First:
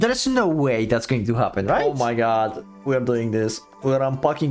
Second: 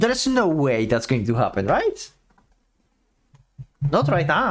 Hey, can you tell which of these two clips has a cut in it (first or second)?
first